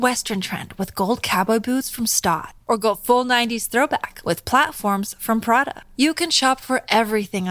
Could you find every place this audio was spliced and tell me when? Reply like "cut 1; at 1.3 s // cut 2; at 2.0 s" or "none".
none